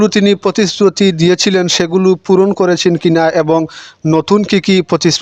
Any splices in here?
no; 0 cuts

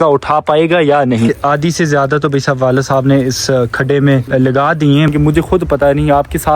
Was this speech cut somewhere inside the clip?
yes; 3 cuts; at 1.4 s, 4.2 s, 5.1 s

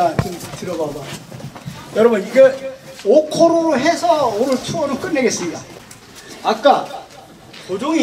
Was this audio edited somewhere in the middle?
no; 0 cuts

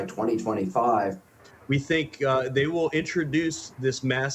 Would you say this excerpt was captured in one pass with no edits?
no; 1 cut; at 1.5 s

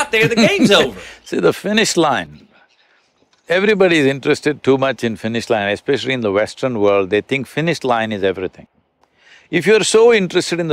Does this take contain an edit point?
no; 0 cuts

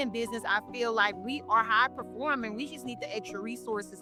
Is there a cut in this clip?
no; 0 cuts

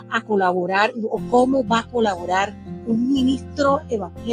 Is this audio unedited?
yes; 0 cuts

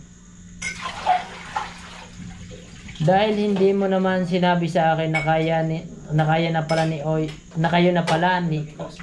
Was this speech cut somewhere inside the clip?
no; 0 cuts

